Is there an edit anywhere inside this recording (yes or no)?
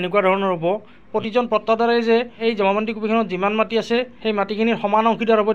yes